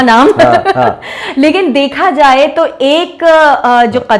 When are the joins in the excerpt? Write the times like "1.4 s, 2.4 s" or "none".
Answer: none